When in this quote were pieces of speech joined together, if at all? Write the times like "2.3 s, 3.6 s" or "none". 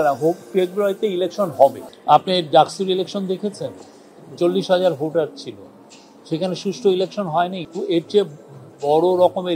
1.9 s, 7.6 s